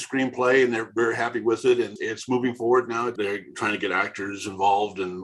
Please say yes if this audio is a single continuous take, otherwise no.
no